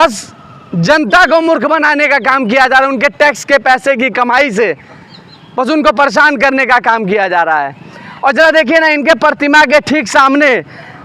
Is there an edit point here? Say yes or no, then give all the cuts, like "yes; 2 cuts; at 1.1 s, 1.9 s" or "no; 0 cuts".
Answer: no; 0 cuts